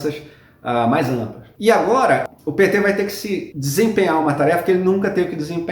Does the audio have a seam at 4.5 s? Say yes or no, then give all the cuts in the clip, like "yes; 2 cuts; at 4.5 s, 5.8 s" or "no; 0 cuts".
no; 2 cuts; at 1.4 s, 2.3 s